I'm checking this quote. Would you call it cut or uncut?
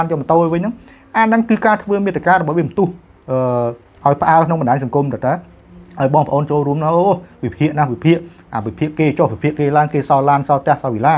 uncut